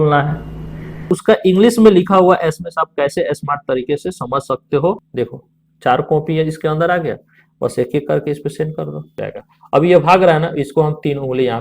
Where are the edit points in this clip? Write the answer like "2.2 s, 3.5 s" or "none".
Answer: 1.1 s, 5.1 s, 9.2 s